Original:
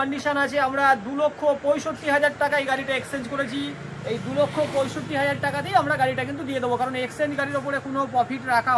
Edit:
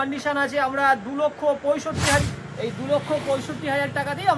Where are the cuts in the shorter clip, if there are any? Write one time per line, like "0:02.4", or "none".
0:02.2